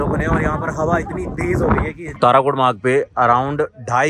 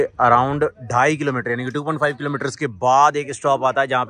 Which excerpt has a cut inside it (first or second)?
first